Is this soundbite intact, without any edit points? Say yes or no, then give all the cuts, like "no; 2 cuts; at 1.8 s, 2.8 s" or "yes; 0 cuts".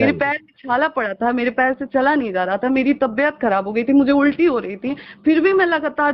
yes; 0 cuts